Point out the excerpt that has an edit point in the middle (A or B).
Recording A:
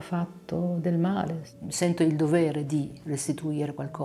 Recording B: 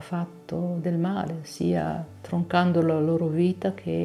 A